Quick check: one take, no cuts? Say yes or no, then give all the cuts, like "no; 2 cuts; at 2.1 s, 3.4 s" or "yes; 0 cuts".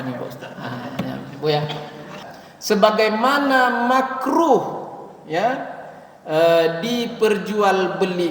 no; 1 cut; at 2.2 s